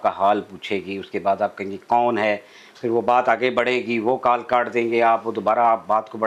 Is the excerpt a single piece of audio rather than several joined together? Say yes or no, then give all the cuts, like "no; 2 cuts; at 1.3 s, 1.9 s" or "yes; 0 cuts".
yes; 0 cuts